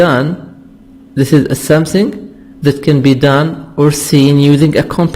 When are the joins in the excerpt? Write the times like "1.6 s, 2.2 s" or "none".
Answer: 4.0 s